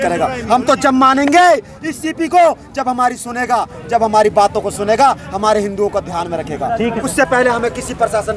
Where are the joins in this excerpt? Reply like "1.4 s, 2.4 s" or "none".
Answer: 7.1 s